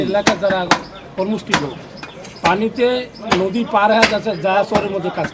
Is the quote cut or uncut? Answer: uncut